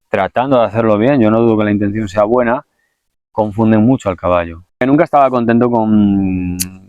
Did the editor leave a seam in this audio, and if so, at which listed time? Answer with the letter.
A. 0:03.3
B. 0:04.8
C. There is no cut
B